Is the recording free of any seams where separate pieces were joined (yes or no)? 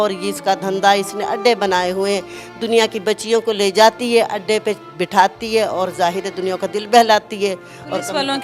yes